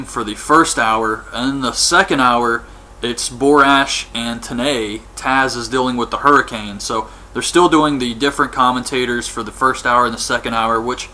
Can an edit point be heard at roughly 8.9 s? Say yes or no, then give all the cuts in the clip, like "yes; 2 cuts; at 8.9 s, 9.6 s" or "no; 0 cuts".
yes; 1 cut; at 8.9 s